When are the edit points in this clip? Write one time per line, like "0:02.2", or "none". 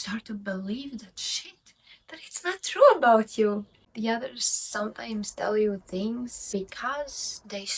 0:03.8
0:06.5